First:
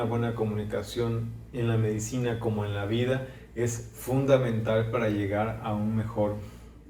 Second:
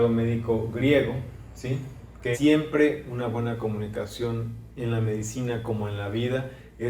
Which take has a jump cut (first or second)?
second